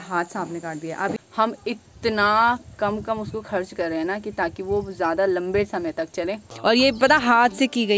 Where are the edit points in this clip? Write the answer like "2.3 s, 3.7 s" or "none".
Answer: 1.2 s, 6.5 s